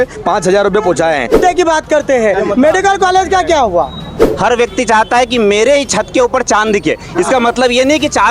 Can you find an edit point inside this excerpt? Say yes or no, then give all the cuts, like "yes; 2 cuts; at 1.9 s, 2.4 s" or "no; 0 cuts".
yes; 2 cuts; at 1.4 s, 4.2 s